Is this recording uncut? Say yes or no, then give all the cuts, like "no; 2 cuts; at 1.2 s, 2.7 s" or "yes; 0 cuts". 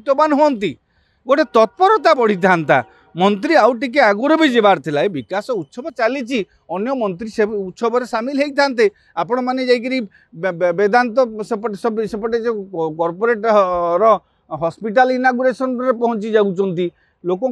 yes; 0 cuts